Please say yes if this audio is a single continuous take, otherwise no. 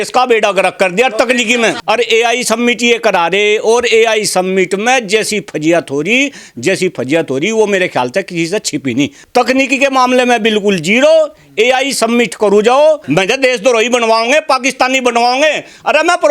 no